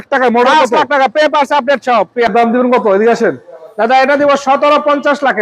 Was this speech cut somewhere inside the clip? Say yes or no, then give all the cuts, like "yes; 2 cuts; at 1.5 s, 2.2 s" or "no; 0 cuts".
yes; 1 cut; at 2.3 s